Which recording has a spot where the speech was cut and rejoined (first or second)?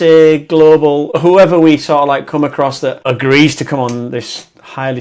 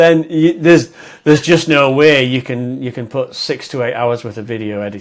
first